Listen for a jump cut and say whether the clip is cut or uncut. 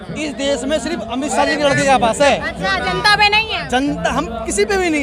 uncut